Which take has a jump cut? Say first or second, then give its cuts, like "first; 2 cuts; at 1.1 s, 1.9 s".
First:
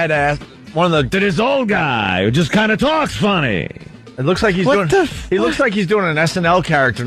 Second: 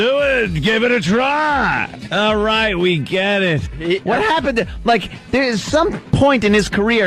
second; 1 cut; at 3.9 s